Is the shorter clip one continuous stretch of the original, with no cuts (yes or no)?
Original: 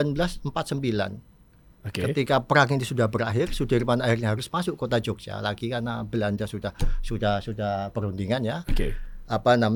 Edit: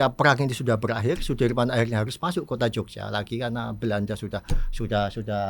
yes